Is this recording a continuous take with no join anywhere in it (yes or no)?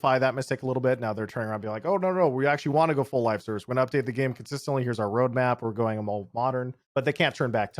no